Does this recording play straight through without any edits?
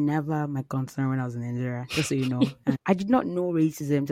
no; 1 cut; at 2.8 s

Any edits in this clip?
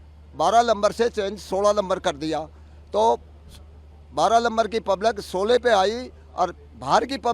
no; 0 cuts

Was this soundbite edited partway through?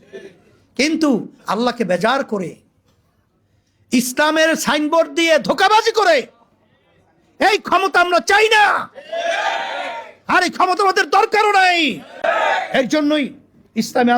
no; 0 cuts

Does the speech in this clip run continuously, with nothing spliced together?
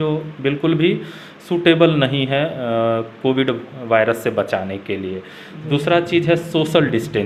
yes; 0 cuts

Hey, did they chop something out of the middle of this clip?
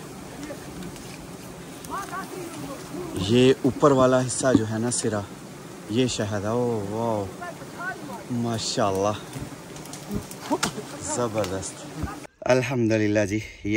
yes; 1 cut; at 12.3 s

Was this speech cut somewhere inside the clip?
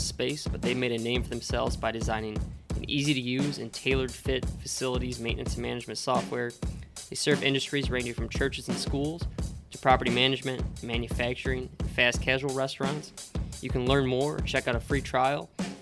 no; 0 cuts

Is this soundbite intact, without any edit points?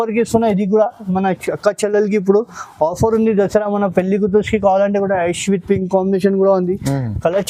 yes; 0 cuts

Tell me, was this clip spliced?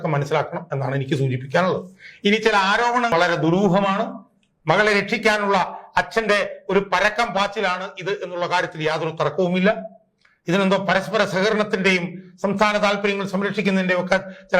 yes; 1 cut; at 3.1 s

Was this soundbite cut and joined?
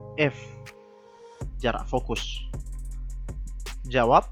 no; 0 cuts

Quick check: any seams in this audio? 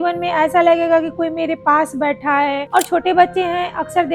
yes; 1 cut; at 2.6 s

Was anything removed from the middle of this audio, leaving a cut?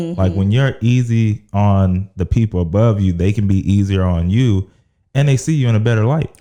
no; 0 cuts

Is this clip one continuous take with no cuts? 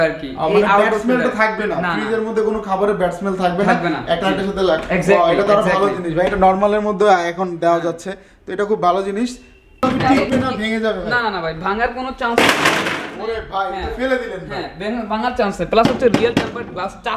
no; 1 cut; at 9.8 s

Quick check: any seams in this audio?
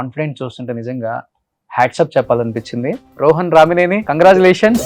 yes; 2 cuts; at 3.1 s, 4.0 s

